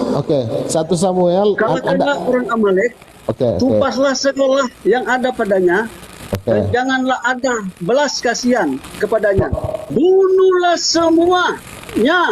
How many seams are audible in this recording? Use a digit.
2